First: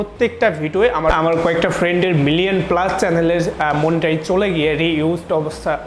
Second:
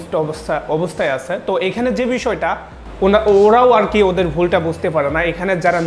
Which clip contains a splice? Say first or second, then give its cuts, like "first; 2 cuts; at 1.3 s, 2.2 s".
first; 1 cut; at 1.1 s